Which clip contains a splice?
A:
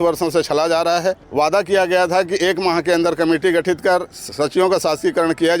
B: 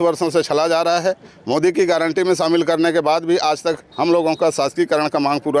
A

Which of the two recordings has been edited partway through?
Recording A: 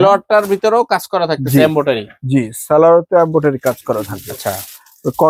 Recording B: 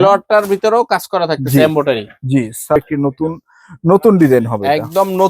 B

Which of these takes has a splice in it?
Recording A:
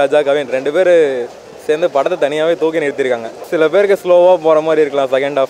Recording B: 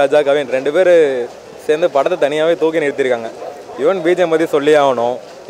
A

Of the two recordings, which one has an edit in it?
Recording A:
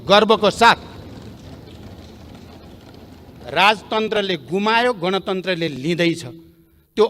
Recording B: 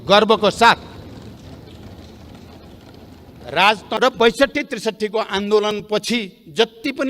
B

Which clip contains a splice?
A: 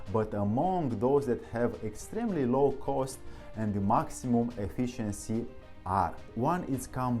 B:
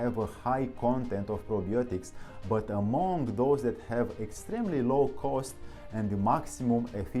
A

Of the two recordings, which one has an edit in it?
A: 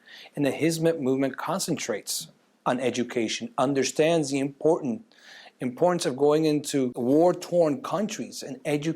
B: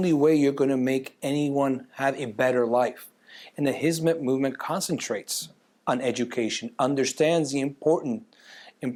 A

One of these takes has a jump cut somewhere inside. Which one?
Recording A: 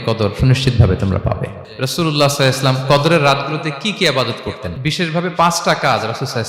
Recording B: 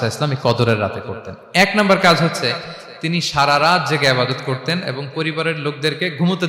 A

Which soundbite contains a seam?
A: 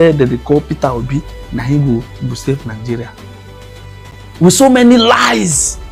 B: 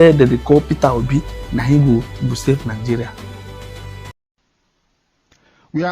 B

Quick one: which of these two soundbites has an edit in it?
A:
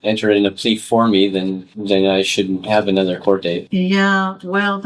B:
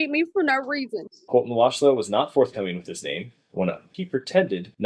B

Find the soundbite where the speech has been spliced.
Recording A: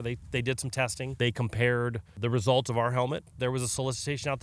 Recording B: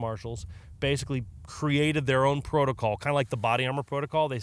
A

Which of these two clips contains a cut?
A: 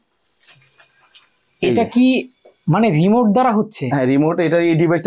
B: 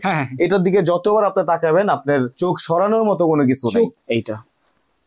B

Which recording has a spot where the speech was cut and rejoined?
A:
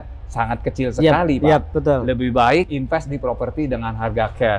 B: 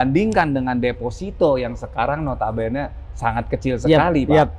A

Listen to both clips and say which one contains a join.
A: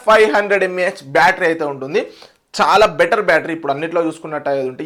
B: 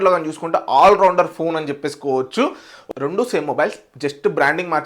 B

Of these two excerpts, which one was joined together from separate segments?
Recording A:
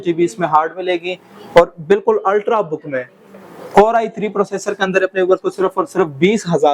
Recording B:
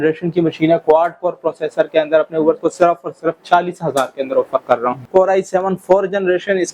B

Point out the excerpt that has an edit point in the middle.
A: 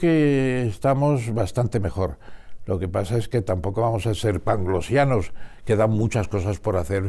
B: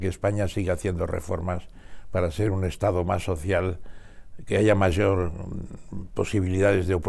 A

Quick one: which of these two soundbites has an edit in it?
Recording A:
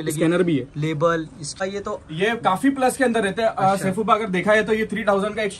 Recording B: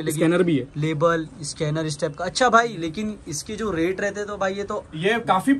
A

